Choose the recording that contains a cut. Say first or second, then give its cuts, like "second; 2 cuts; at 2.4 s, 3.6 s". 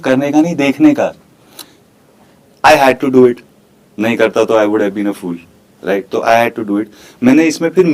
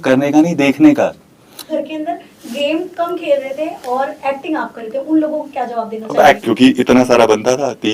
second; 2 cuts; at 1.6 s, 6.4 s